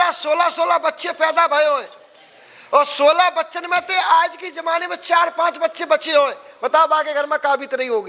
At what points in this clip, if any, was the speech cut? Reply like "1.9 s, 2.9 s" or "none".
none